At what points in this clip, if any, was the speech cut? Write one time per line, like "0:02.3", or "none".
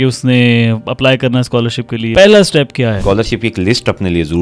0:02.1
0:03.0